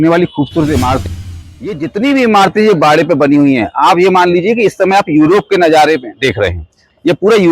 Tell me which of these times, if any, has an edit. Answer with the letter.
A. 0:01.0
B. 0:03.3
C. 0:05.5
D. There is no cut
A